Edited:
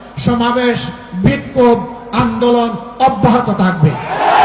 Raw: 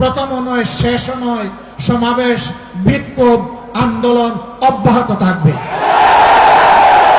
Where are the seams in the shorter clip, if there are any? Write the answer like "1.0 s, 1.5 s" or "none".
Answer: none